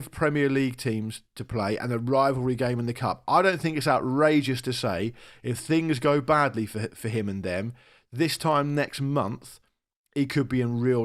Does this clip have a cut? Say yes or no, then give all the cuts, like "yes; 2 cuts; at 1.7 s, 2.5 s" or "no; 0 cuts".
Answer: no; 0 cuts